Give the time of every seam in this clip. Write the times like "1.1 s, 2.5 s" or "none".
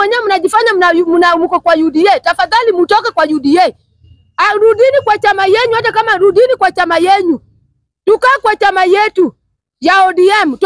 none